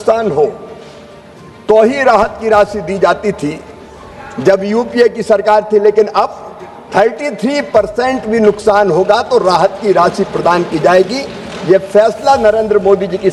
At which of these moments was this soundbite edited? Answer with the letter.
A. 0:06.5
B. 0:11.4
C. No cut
C